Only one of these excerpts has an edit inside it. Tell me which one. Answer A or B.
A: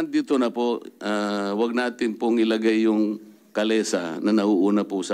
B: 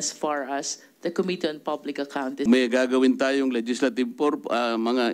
B